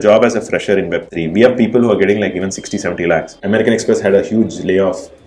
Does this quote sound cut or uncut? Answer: cut